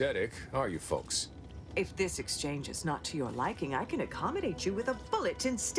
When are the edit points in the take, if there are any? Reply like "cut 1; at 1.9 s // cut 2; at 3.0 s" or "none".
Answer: none